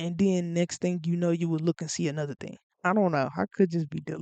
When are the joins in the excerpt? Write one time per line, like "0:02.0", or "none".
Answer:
0:02.6